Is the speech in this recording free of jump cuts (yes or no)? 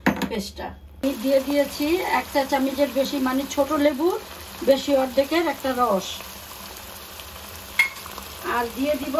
no